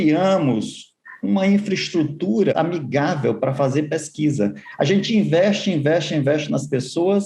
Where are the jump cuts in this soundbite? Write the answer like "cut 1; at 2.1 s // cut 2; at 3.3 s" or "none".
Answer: cut 1; at 2.5 s